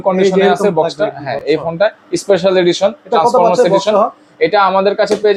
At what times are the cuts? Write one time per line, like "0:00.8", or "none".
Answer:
none